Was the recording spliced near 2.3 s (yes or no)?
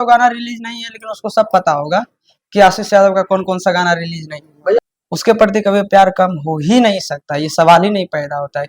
no